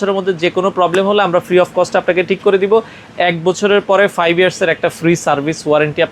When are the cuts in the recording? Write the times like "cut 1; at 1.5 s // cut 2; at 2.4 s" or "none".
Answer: none